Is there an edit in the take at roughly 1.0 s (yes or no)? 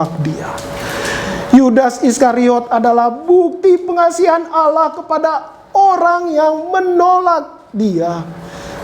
no